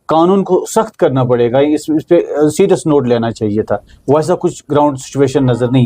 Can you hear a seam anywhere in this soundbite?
no; 0 cuts

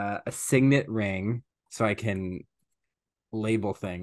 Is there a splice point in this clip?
yes; 1 cut; at 1.6 s

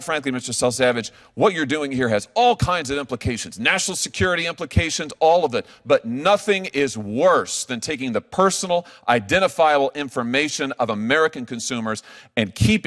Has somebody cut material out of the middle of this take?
no; 0 cuts

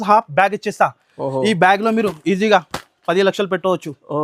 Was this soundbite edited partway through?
no; 0 cuts

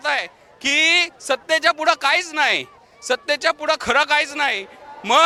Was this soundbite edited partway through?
no; 0 cuts

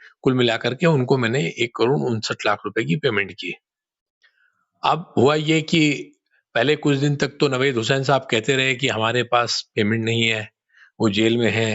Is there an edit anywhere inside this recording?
no; 0 cuts

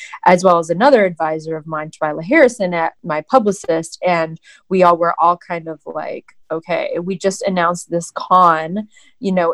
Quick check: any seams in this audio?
yes; 1 cut; at 3.0 s

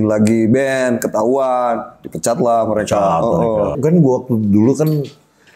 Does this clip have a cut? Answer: yes; 1 cut; at 3.8 s

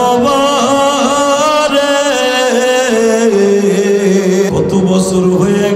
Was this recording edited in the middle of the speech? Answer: yes; 1 cut; at 4.5 s

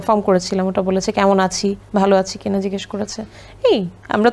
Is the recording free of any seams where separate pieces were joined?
yes; 0 cuts

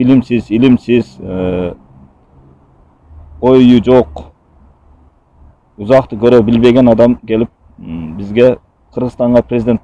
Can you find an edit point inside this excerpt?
no; 0 cuts

